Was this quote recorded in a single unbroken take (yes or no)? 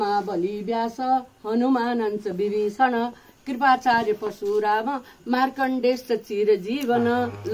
yes